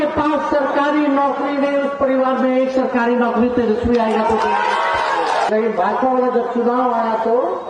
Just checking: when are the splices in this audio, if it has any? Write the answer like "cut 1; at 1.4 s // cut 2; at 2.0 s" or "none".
cut 1; at 5.5 s